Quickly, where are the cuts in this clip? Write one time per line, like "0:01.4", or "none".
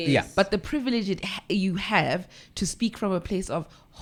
none